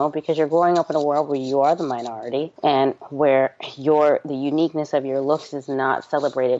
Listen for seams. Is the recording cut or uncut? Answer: uncut